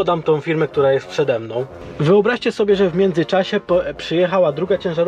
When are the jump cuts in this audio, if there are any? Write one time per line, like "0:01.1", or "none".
0:01.8